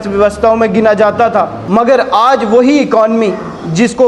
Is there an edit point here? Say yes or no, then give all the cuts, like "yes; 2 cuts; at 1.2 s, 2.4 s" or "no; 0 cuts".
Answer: yes; 1 cut; at 1.6 s